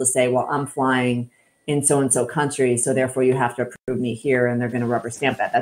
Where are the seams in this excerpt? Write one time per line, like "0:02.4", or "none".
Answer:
none